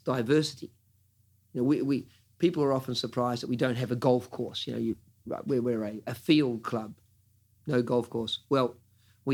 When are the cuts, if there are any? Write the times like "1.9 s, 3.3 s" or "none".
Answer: none